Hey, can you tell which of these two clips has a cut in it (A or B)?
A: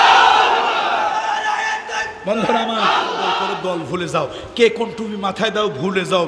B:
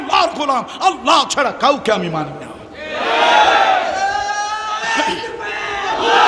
A